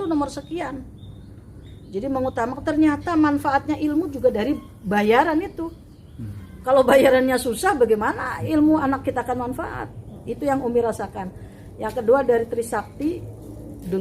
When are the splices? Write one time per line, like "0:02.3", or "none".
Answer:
none